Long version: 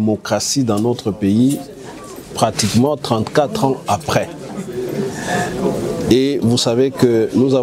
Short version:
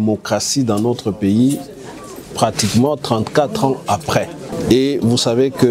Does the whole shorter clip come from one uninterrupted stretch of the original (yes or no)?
no